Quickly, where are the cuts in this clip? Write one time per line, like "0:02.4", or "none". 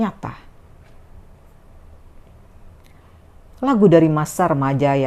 none

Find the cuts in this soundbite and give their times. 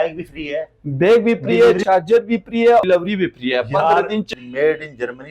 0:01.8
0:02.8
0:04.3

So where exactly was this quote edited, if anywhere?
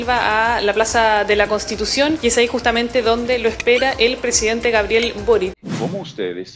0:02.2
0:05.6

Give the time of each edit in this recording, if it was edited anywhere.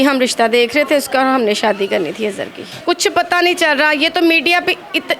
0:02.8

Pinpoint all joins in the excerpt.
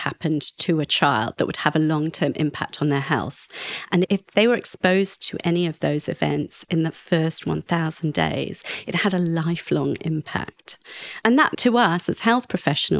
none

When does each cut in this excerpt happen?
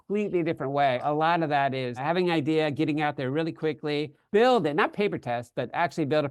0:01.0
0:02.0
0:04.2

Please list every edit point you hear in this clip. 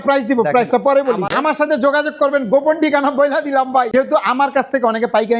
0:01.3
0:03.9

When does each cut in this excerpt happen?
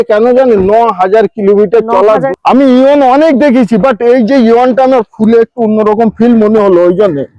0:02.3

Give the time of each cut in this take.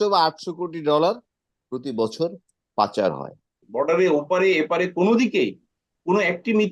0:03.6

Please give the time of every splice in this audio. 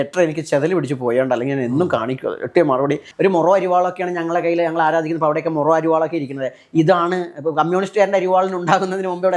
0:03.1

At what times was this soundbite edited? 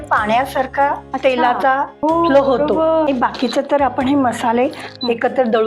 0:01.1
0:01.9
0:03.0

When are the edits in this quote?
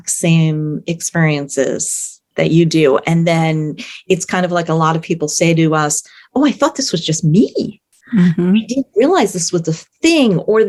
none

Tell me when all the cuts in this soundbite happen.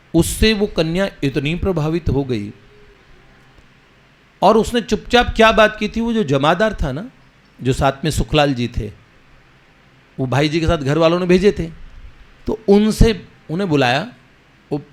none

